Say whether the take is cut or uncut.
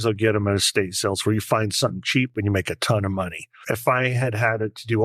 cut